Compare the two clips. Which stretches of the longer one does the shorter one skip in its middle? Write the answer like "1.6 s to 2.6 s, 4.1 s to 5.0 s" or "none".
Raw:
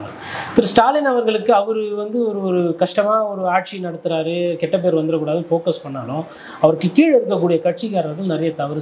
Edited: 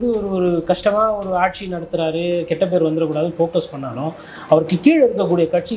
none